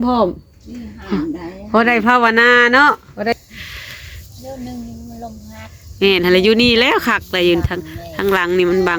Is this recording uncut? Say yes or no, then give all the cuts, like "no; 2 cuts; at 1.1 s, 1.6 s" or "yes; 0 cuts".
no; 1 cut; at 3.3 s